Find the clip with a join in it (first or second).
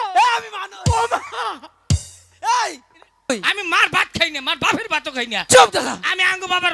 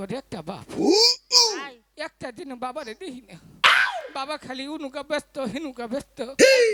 first